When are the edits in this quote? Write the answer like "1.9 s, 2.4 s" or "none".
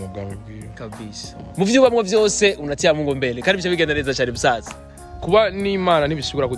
1.4 s